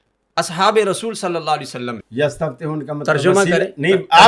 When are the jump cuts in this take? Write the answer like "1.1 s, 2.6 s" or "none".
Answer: 2.0 s